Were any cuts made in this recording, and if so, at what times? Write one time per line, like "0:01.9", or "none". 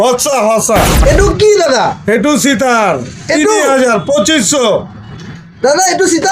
0:01.0